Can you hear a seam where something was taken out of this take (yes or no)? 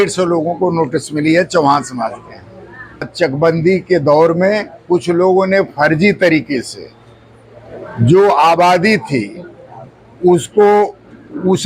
yes